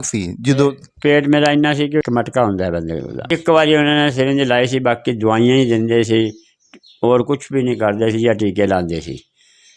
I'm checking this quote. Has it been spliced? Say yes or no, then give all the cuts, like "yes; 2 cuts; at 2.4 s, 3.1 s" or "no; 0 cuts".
yes; 2 cuts; at 2.0 s, 3.2 s